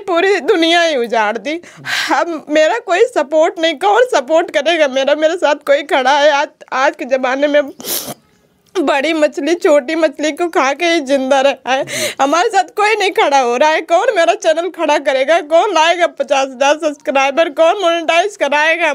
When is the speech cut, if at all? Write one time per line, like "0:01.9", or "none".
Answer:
none